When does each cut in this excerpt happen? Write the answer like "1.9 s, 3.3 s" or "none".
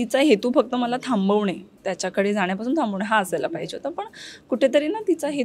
none